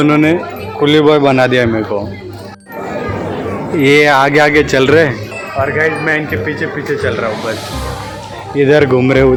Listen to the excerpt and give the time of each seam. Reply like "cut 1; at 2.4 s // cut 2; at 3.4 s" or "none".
none